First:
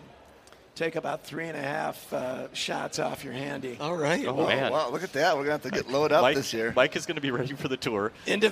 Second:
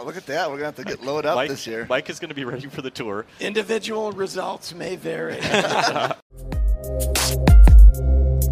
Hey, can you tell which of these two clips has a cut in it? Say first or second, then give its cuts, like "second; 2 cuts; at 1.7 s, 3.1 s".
second; 1 cut; at 6.2 s